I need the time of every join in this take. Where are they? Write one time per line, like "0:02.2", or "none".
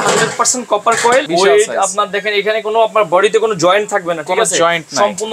0:01.3